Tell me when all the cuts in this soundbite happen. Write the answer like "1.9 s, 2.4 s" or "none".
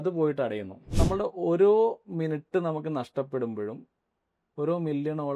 0.9 s